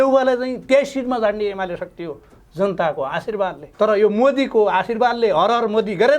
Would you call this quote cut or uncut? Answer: cut